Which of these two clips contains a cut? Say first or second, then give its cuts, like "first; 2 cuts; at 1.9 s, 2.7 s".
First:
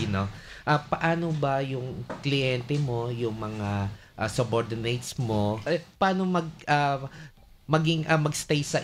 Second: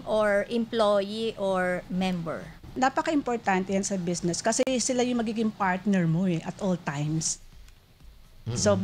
second; 1 cut; at 2.7 s